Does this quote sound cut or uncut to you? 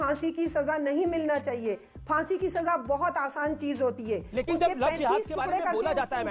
uncut